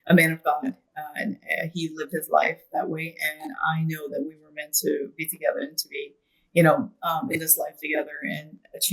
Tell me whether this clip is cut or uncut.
uncut